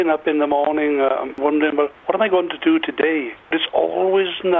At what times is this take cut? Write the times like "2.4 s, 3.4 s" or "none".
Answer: 1.5 s, 3.6 s